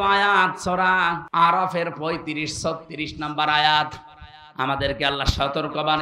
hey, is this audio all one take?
no; 1 cut; at 1.2 s

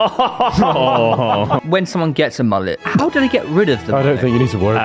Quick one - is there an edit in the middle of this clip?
yes; 2 cuts; at 1.6 s, 2.8 s

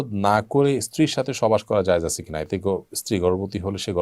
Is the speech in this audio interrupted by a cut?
no; 0 cuts

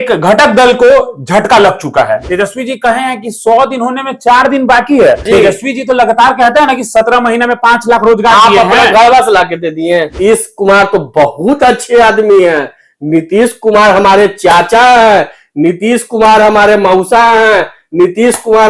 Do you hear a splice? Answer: yes; 3 cuts; at 2.2 s, 5.2 s, 10.1 s

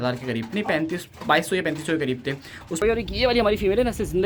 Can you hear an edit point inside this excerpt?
yes; 1 cut; at 2.8 s

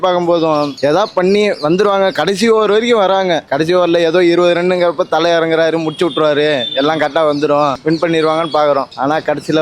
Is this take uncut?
yes; 0 cuts

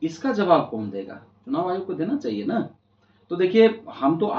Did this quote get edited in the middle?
no; 0 cuts

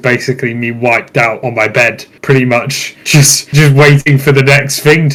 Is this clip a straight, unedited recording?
yes; 0 cuts

